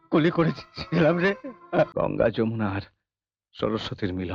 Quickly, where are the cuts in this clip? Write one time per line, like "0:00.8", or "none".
0:01.9